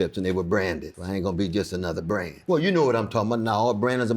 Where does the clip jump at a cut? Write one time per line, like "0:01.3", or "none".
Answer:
0:00.9
0:02.3